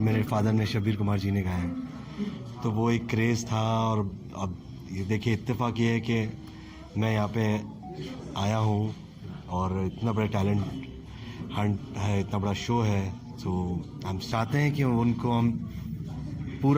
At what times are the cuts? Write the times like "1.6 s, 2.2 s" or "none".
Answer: 14.3 s